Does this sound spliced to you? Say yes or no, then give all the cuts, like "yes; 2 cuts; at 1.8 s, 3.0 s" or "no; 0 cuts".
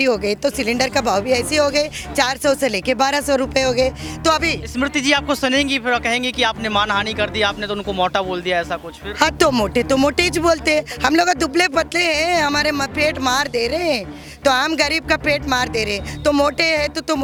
no; 0 cuts